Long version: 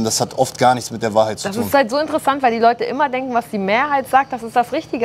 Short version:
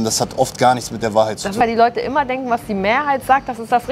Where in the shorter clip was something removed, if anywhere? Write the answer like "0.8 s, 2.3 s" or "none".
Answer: 1.5 s